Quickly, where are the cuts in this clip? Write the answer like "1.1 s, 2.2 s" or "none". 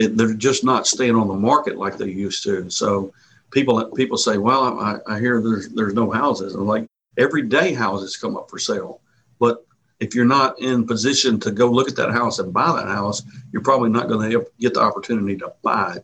none